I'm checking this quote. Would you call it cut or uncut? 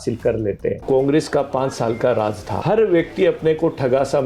cut